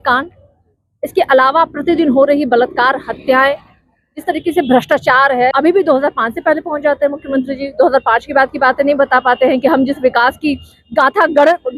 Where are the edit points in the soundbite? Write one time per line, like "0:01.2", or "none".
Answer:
0:05.5